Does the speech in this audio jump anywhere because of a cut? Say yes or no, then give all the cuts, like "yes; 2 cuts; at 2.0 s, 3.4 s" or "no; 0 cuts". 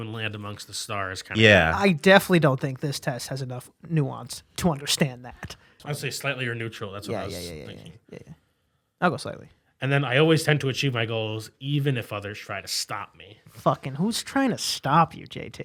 no; 0 cuts